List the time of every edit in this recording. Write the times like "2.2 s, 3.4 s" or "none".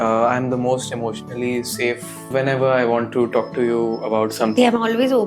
2.3 s, 4.5 s

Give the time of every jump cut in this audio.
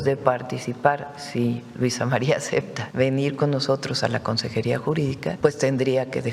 2.8 s, 5.4 s

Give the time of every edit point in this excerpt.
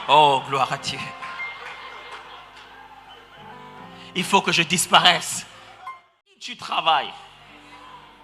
6.5 s

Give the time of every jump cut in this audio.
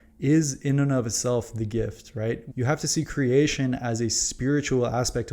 2.5 s

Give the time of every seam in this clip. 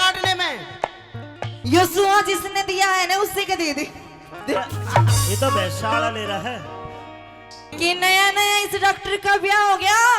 1.5 s, 7.7 s

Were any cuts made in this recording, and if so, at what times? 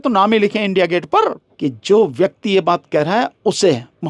1.5 s

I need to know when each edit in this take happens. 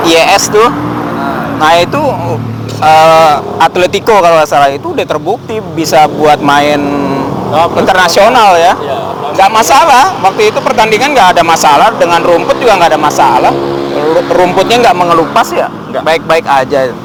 none

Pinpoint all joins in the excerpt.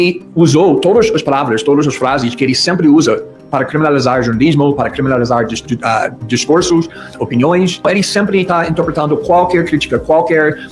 7.8 s

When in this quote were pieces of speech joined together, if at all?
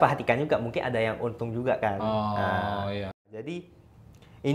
3.2 s

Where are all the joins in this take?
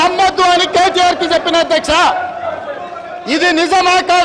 none

